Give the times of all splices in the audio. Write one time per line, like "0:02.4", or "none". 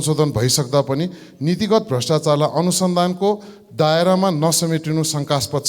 none